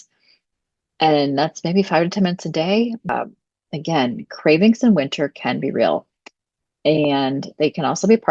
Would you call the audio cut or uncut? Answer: cut